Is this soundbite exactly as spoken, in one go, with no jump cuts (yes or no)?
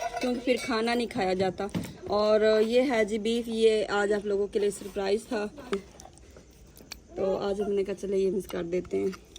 no